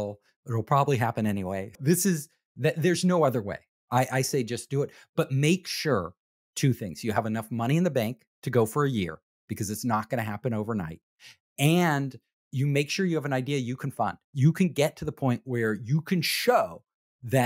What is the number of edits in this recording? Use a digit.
1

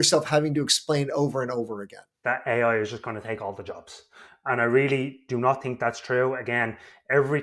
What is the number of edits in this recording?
1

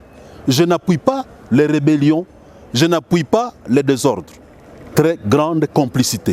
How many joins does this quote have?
1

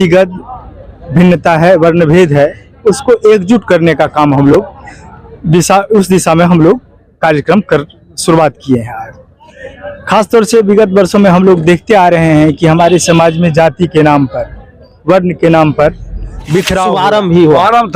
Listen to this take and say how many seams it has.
1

